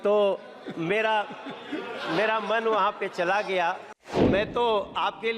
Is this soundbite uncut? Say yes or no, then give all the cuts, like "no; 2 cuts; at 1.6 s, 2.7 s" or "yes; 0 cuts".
no; 1 cut; at 4.2 s